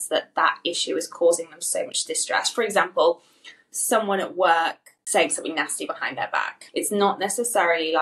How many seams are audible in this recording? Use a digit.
2